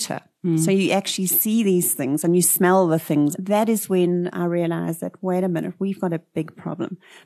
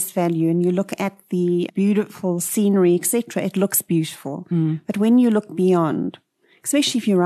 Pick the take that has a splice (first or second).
first